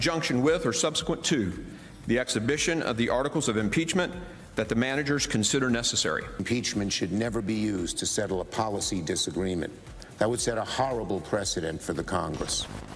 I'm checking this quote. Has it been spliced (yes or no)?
no